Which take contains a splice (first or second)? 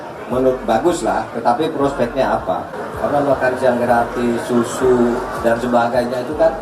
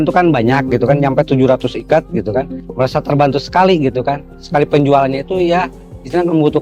first